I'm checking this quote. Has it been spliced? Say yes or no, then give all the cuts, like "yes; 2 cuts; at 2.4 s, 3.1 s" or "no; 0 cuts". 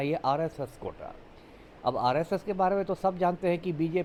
no; 0 cuts